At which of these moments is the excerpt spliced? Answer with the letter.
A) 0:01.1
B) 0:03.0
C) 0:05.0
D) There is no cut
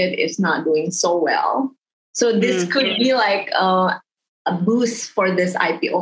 D